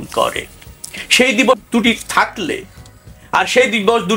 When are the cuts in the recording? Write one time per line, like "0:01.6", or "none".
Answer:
0:01.6